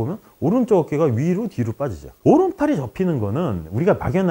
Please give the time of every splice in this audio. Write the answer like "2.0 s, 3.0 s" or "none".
2.2 s

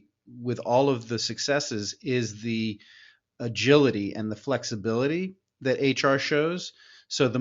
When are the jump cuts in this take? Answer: none

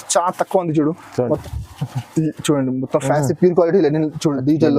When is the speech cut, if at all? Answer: 1.4 s

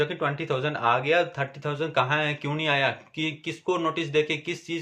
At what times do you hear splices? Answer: none

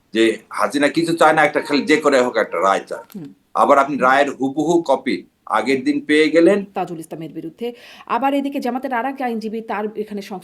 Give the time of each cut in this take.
6.7 s

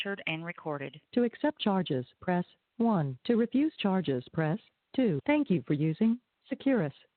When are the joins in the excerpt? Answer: 0.9 s, 5.2 s

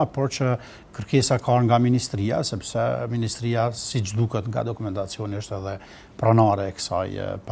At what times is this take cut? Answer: none

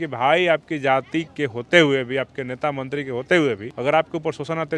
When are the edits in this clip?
1.4 s, 3.7 s

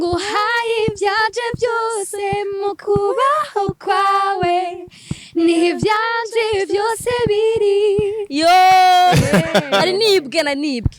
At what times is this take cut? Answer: none

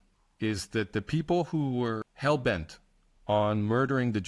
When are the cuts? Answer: 2.1 s

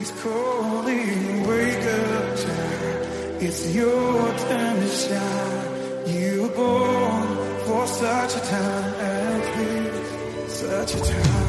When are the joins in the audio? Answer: none

